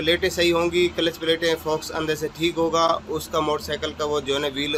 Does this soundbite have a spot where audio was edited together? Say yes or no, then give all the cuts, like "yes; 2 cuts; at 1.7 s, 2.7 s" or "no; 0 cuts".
no; 0 cuts